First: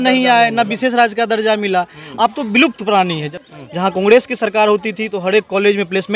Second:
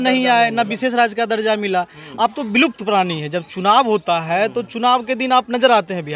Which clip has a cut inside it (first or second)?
first